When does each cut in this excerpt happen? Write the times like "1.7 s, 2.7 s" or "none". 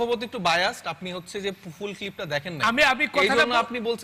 none